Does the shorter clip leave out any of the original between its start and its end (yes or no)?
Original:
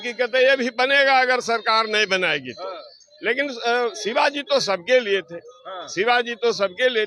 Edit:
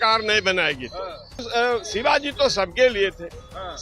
yes